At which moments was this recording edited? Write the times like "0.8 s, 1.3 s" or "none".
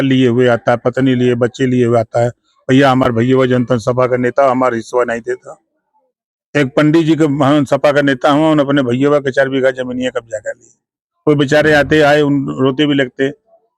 none